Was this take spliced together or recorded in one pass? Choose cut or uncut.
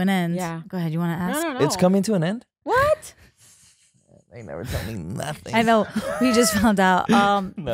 uncut